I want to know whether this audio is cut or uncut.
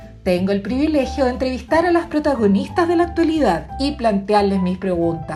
uncut